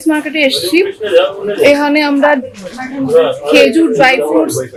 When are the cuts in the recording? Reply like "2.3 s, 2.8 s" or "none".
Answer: none